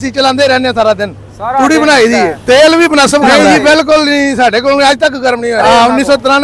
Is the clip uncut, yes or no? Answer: no